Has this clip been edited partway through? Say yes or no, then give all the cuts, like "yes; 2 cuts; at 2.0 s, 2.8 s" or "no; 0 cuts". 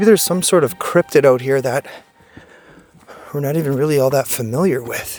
no; 0 cuts